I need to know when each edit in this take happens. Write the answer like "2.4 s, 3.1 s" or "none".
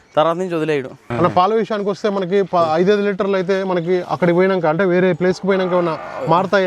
1.0 s